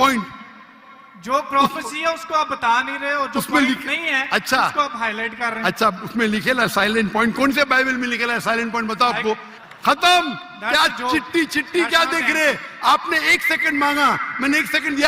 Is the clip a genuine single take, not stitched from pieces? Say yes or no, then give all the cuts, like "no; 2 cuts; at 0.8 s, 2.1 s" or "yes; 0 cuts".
no; 1 cut; at 9.6 s